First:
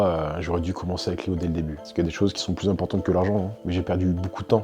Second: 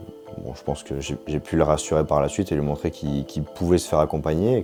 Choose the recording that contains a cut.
first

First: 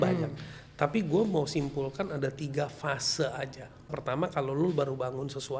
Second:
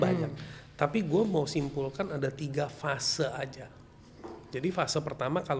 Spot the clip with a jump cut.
first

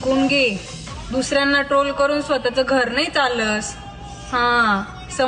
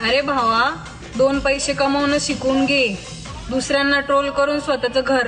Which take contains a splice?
first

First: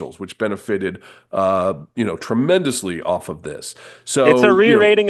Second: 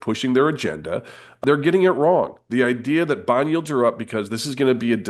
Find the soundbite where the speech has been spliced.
second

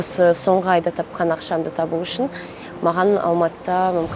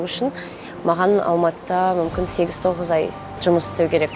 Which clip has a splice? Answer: second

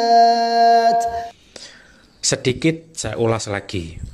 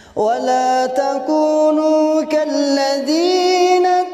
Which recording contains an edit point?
first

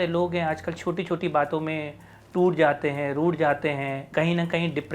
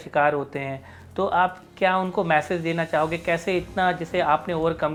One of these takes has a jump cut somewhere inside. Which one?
first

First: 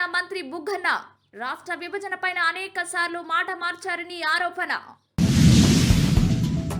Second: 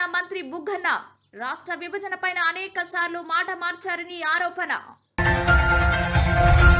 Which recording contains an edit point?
first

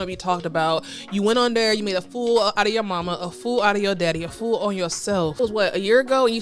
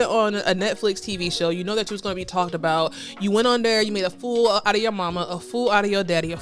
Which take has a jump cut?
first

